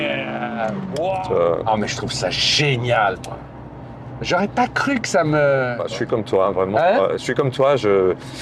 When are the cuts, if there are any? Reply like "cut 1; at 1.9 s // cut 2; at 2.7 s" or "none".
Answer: cut 1; at 1.1 s // cut 2; at 5.8 s